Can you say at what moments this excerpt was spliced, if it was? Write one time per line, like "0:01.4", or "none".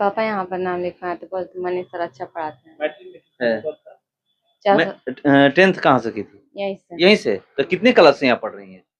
none